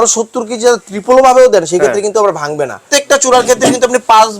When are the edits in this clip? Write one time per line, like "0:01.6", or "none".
0:02.8